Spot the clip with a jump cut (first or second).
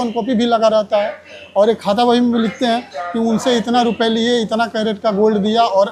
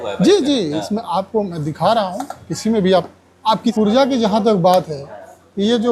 second